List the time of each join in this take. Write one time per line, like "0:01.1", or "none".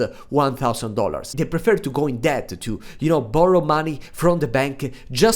0:01.3